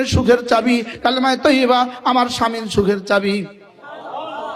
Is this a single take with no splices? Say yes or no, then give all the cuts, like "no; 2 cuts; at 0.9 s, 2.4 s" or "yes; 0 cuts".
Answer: yes; 0 cuts